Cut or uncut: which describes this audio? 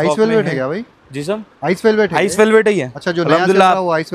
uncut